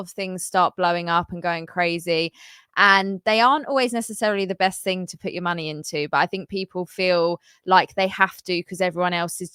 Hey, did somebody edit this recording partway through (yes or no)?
no